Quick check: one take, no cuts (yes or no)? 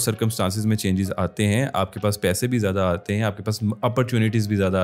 yes